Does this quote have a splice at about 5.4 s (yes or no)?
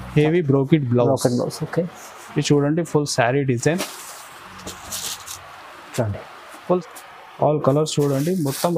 no